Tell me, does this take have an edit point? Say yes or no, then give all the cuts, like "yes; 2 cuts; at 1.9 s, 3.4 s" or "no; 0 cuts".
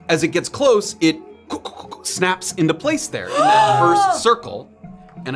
no; 0 cuts